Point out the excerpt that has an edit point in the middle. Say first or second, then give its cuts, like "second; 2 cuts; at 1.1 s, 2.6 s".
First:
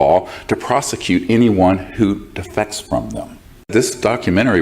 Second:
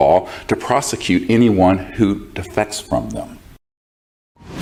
first; 1 cut; at 3.7 s